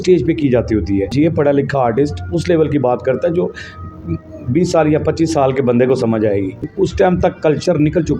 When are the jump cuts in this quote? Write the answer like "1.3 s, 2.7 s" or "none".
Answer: 1.1 s, 6.7 s